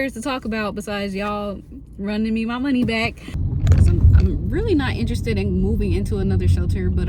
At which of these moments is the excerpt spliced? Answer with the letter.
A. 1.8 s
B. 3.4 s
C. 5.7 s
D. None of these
B